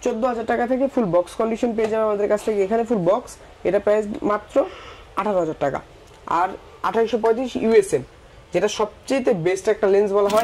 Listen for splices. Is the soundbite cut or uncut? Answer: uncut